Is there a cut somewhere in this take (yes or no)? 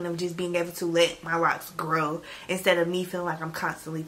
no